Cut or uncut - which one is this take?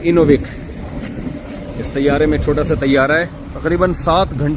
cut